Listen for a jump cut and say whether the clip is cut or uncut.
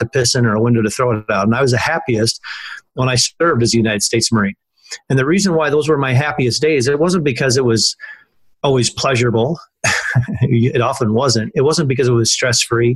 uncut